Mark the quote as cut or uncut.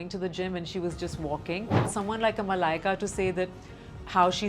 cut